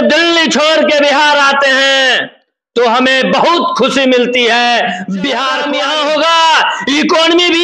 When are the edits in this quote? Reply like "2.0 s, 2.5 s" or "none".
5.6 s